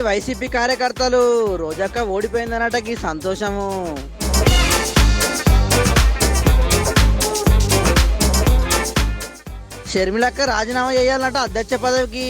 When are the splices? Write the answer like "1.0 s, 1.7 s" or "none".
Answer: none